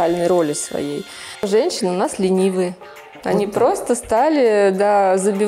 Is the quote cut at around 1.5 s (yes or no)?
yes